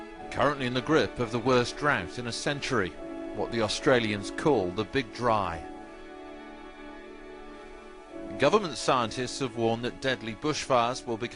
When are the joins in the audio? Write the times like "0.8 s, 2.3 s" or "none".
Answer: 9.0 s